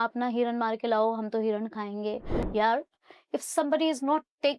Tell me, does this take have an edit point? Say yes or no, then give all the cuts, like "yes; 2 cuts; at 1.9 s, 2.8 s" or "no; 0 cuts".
yes; 1 cut; at 2.3 s